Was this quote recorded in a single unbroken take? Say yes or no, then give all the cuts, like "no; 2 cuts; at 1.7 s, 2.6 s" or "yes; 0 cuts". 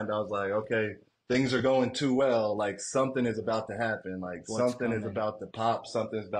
no; 1 cut; at 1.1 s